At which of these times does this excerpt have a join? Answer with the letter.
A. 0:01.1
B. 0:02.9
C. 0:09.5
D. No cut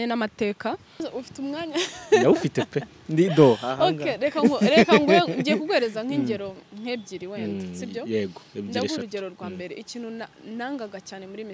A